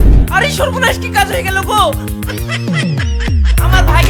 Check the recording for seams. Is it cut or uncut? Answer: uncut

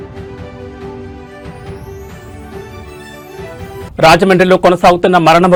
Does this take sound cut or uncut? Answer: uncut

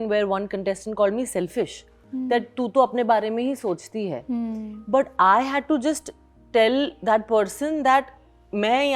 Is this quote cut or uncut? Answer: uncut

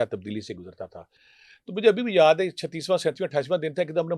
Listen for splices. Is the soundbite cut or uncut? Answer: uncut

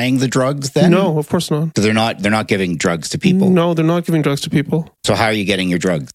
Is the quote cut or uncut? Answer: uncut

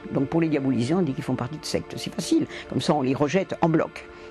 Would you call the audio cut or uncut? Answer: uncut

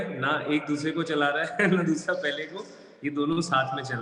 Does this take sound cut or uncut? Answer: uncut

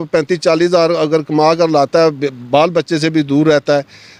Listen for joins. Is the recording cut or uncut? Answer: uncut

